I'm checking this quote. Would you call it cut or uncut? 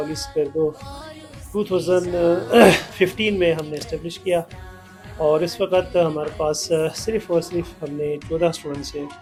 uncut